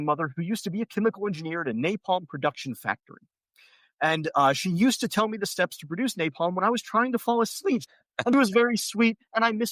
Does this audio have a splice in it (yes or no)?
no